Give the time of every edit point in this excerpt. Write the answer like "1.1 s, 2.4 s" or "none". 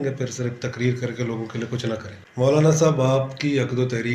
2.2 s